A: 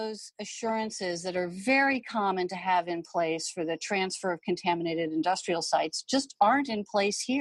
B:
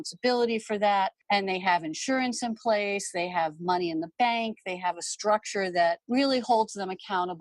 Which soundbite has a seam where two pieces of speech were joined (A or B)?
B